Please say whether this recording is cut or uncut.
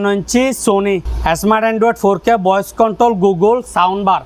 cut